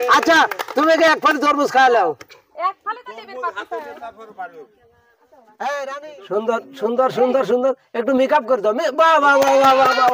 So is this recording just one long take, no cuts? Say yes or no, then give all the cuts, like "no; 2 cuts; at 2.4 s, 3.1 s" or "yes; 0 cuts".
no; 1 cut; at 6.0 s